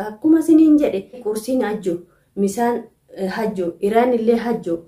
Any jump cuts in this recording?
yes; 1 cut; at 1.2 s

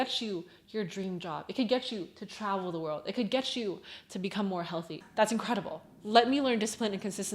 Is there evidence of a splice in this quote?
yes; 1 cut; at 5.0 s

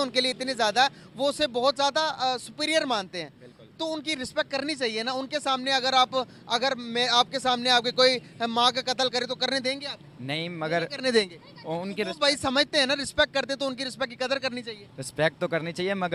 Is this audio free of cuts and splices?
yes; 0 cuts

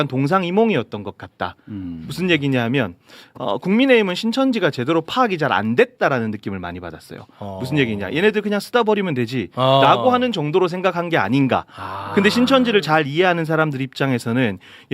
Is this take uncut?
yes; 0 cuts

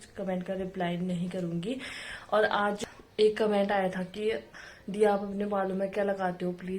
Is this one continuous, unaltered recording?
no; 1 cut; at 2.8 s

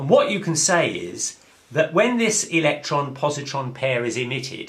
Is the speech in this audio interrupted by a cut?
yes; 1 cut; at 3.4 s

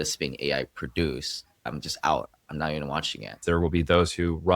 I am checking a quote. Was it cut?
yes; 2 cuts; at 1.8 s, 3.4 s

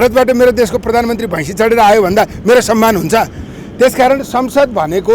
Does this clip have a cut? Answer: no; 0 cuts

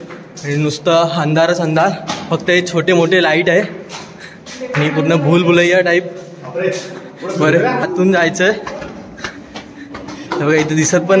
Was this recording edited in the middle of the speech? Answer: yes; 1 cut; at 7.8 s

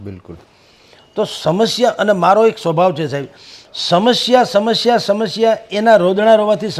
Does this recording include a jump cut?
no; 0 cuts

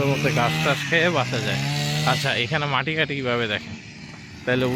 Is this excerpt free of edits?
yes; 0 cuts

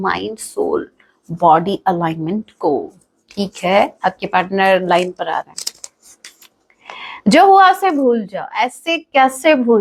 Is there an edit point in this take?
no; 0 cuts

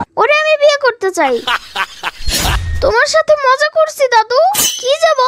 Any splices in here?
yes; 1 cut; at 2.6 s

